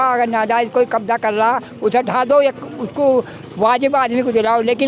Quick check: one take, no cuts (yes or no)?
yes